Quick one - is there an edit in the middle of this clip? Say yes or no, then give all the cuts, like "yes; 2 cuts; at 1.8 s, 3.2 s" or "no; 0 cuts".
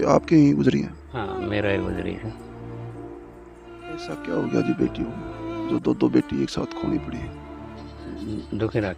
yes; 3 cuts; at 2.5 s, 4.1 s, 7.9 s